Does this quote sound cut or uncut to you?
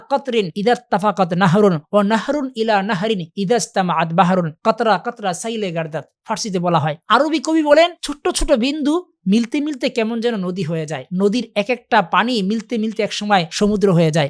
uncut